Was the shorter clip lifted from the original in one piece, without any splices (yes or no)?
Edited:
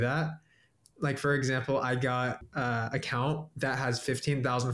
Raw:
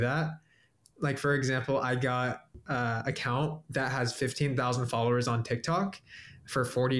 no